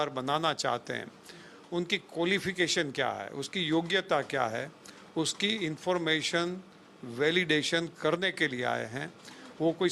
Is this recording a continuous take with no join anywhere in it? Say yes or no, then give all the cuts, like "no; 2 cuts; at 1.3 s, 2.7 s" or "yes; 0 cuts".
yes; 0 cuts